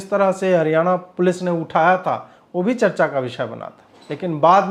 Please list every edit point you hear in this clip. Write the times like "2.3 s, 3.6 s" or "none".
none